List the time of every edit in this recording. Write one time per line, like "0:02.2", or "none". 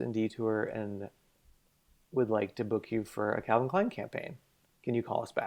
none